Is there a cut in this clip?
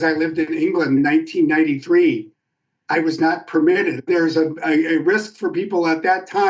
yes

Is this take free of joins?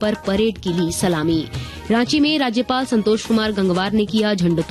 yes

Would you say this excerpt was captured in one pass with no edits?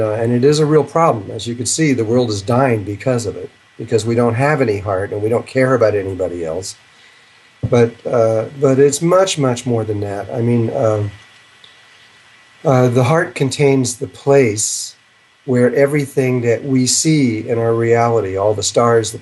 yes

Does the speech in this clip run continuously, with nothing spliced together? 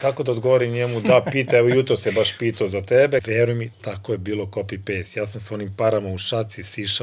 no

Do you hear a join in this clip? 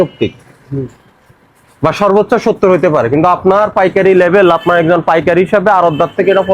no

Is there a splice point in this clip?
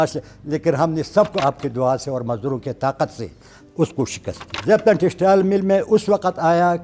yes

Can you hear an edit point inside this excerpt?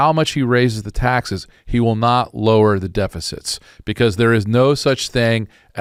no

